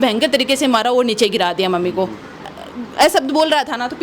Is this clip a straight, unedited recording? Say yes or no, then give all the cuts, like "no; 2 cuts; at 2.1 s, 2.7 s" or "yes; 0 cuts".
no; 1 cut; at 2.5 s